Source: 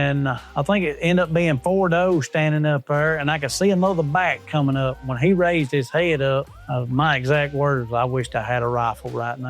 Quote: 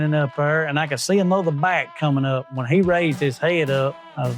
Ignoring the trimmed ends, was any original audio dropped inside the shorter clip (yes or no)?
no